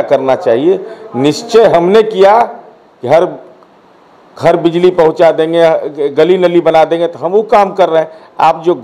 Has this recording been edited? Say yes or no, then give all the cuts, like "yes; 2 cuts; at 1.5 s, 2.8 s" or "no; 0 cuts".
no; 0 cuts